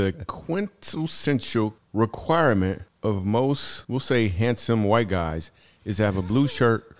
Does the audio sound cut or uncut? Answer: cut